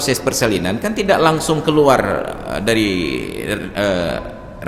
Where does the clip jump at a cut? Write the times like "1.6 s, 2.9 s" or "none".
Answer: none